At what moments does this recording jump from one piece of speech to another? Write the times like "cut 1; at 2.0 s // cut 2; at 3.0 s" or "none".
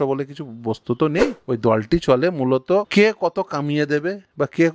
cut 1; at 1.4 s // cut 2; at 2.9 s

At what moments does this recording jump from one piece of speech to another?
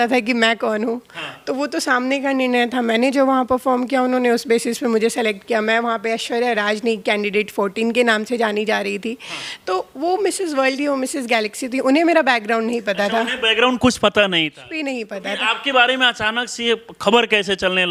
none

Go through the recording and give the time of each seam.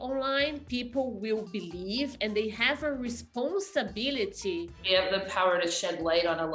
cut 1; at 4.7 s

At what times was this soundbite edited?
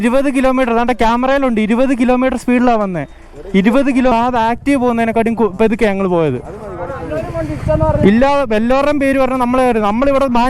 cut 1; at 4.1 s

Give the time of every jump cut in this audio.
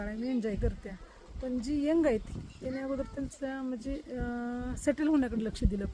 none

